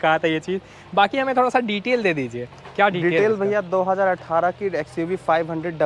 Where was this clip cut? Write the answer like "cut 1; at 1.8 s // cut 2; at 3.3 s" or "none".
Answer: none